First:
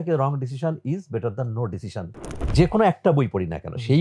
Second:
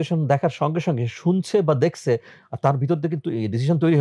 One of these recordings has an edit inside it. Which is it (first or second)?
first